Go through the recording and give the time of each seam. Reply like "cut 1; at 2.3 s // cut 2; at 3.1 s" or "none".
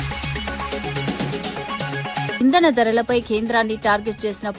cut 1; at 0.8 s // cut 2; at 2.4 s